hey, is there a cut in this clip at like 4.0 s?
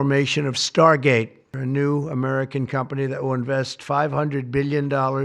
no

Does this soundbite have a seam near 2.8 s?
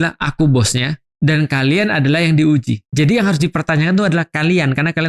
yes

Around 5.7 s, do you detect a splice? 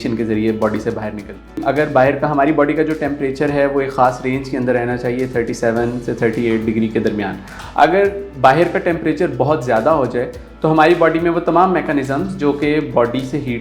no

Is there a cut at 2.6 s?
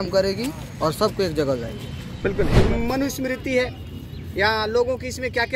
yes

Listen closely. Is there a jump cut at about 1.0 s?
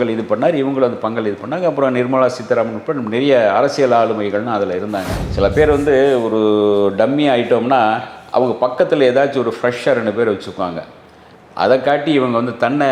no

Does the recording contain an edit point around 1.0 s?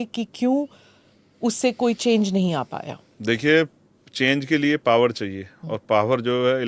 no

